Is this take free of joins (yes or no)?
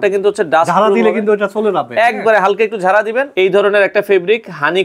no